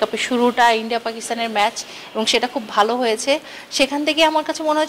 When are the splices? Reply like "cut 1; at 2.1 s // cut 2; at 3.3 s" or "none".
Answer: none

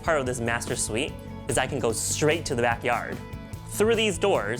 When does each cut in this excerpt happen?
none

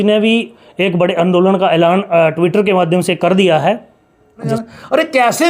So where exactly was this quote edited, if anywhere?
cut 1; at 4.5 s

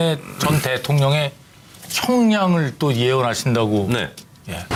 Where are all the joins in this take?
none

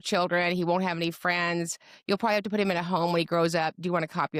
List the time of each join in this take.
none

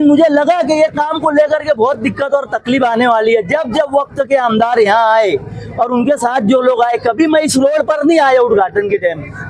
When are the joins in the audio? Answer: none

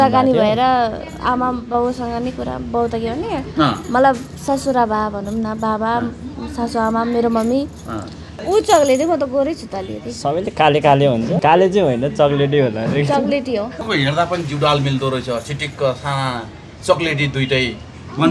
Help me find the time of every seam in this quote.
cut 1; at 8.2 s // cut 2; at 11.4 s // cut 3; at 13.9 s

